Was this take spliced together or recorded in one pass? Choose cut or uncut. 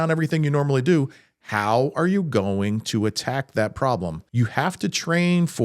cut